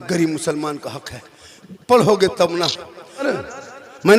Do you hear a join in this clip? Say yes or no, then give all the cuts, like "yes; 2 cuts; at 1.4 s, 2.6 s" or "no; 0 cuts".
yes; 1 cut; at 3.3 s